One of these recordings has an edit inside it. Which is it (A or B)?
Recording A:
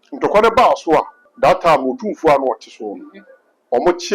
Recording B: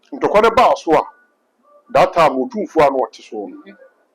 A